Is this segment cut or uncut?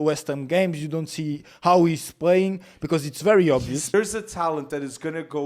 cut